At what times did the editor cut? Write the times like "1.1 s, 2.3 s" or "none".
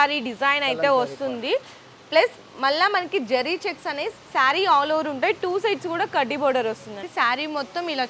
7.0 s